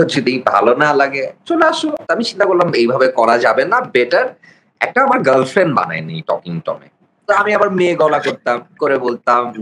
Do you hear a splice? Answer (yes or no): yes